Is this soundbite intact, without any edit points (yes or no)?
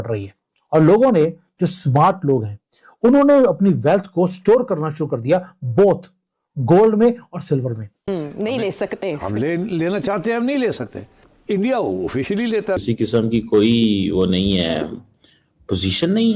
no